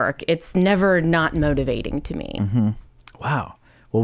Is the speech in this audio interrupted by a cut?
yes; 1 cut; at 2.2 s

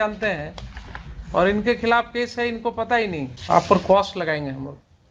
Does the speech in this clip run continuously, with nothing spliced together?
no; 1 cut; at 3.3 s

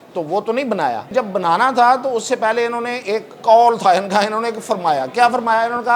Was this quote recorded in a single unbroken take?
no; 1 cut; at 1.1 s

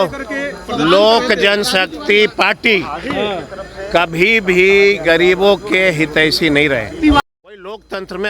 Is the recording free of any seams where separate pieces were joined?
no; 1 cut; at 7.2 s

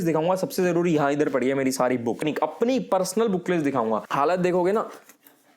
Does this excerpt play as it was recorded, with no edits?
no; 2 cuts; at 2.2 s, 4.1 s

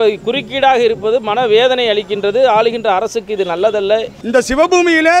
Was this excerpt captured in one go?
no; 1 cut; at 4.2 s

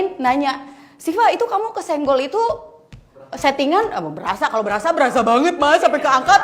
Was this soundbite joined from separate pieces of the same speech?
no; 0 cuts

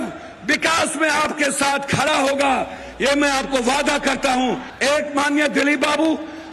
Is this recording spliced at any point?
yes; 1 cut; at 4.7 s

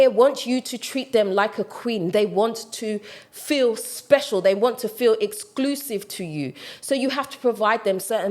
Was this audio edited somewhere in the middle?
no; 0 cuts

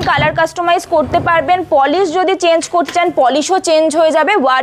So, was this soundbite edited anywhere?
no; 0 cuts

